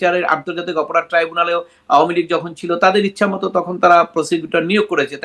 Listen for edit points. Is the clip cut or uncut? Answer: uncut